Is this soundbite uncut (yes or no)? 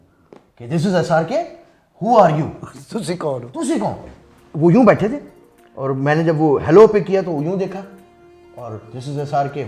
yes